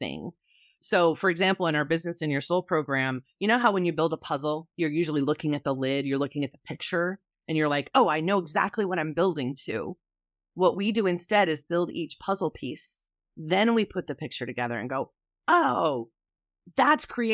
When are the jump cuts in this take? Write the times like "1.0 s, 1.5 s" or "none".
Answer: 16.1 s